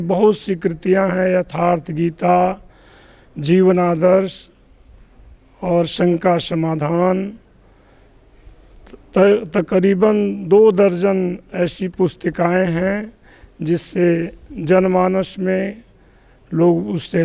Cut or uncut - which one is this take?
uncut